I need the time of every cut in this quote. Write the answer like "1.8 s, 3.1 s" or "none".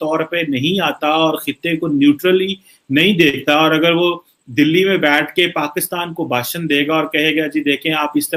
none